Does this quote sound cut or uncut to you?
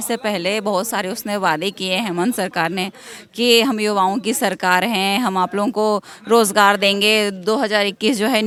uncut